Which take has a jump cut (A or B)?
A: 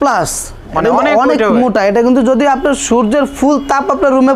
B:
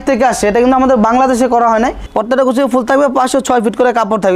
B